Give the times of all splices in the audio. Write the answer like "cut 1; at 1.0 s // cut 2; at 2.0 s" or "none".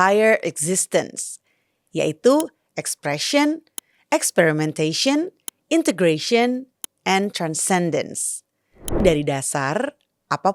cut 1; at 9.0 s